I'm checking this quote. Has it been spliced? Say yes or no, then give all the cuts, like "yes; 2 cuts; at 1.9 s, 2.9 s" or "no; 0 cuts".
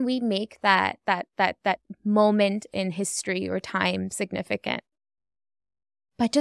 no; 0 cuts